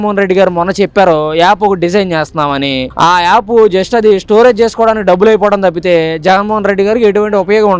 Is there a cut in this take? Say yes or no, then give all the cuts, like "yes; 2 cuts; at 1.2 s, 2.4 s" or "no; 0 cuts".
no; 0 cuts